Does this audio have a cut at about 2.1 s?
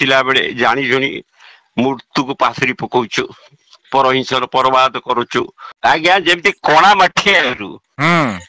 no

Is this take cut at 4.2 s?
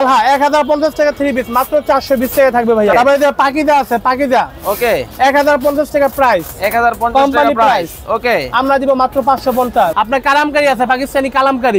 no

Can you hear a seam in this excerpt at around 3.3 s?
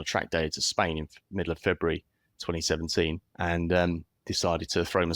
yes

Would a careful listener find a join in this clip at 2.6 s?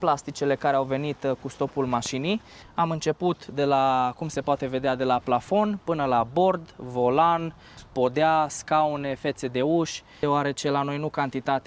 yes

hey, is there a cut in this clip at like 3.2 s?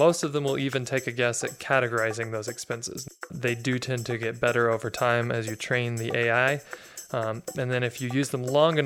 yes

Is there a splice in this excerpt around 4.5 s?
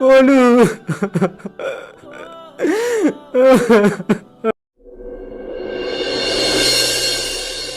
yes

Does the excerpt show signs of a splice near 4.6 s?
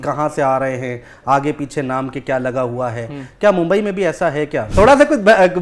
yes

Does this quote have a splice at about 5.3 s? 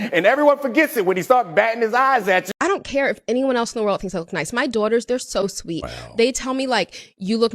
no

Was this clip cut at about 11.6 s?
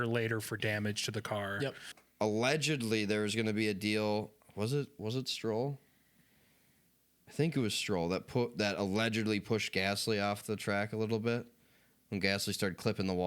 no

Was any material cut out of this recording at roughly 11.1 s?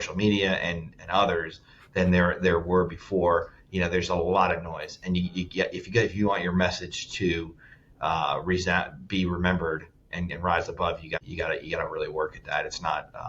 yes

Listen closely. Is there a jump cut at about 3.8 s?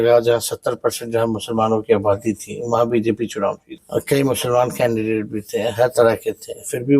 yes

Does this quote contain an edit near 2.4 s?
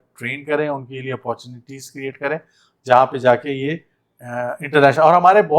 no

